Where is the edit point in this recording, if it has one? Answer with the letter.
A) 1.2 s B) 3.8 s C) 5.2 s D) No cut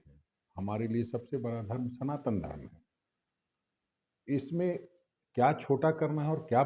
D